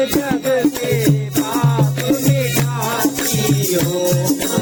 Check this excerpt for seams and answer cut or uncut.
uncut